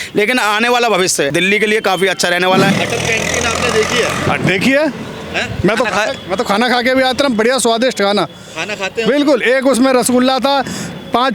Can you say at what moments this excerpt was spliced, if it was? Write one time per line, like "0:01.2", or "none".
0:01.3
0:02.7